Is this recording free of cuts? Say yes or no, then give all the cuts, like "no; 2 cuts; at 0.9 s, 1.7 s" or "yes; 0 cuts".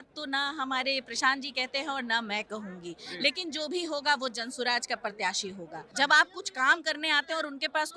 no; 1 cut; at 5.8 s